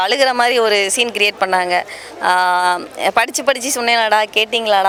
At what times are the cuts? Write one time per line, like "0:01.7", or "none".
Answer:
none